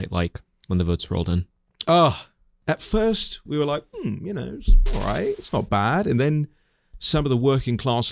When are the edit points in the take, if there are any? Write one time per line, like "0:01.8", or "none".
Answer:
0:02.6